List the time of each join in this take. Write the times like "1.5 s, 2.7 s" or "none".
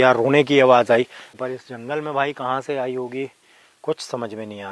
1.3 s